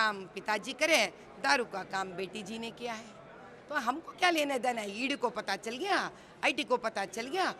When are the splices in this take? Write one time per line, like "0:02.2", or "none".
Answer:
none